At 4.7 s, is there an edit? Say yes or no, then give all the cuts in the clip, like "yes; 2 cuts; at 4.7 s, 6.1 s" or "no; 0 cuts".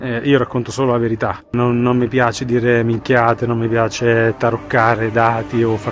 no; 1 cut; at 1.5 s